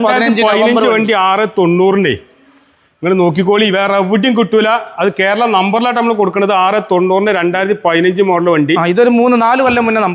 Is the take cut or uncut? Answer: uncut